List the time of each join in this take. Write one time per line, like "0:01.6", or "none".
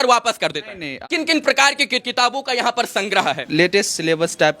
0:01.0
0:02.0
0:03.4